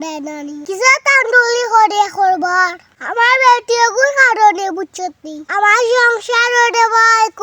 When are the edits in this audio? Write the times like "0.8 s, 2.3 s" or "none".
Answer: 2.9 s